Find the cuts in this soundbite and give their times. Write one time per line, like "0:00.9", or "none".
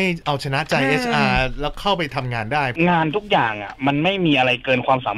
0:02.7